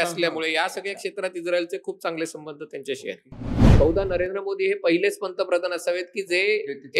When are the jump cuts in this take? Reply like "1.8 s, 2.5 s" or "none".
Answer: 3.6 s

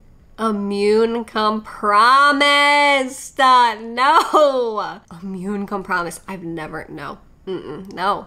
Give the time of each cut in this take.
5.1 s

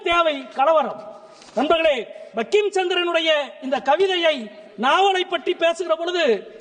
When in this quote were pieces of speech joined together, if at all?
none

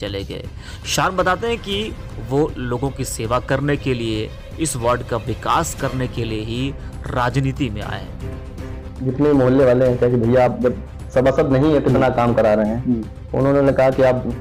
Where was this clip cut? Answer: none

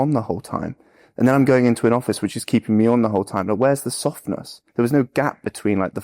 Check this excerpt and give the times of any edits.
4.6 s

